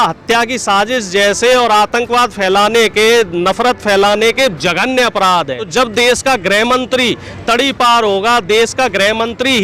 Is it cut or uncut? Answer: cut